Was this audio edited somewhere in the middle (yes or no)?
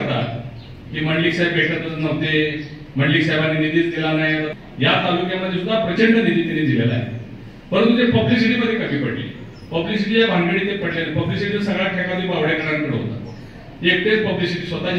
yes